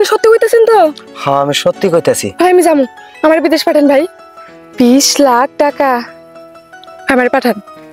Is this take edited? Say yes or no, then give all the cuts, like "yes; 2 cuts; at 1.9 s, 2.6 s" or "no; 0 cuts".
no; 0 cuts